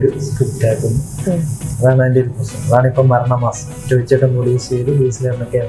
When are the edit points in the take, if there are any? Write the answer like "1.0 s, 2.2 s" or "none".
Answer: none